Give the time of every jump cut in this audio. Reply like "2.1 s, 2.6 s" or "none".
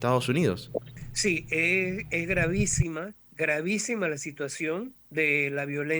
1.0 s, 3.2 s, 5.0 s